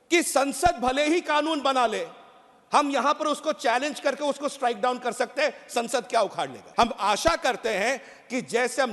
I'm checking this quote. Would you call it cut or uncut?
cut